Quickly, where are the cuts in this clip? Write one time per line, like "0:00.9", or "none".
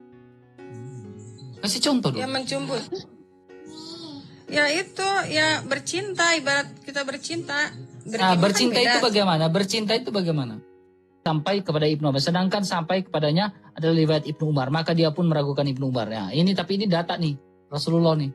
0:11.2